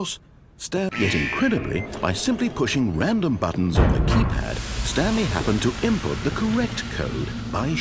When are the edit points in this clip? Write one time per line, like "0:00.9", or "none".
none